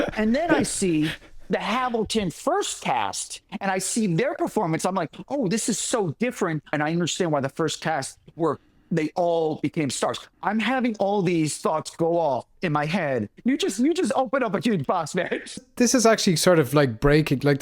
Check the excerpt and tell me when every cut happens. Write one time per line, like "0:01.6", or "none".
0:06.7
0:13.3
0:15.7